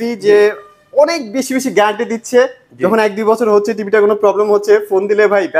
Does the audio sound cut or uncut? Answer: uncut